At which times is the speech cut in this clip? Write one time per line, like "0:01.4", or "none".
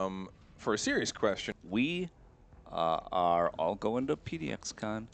0:01.5